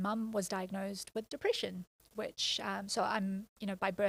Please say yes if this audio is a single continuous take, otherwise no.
yes